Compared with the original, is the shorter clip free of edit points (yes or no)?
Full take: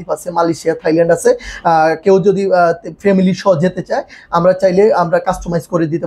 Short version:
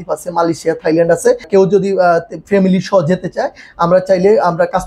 no